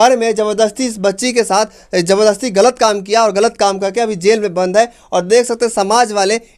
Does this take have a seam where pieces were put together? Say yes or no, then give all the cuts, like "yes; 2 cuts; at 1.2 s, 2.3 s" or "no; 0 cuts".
no; 0 cuts